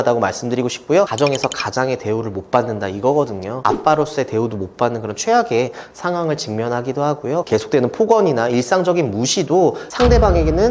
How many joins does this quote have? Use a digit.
3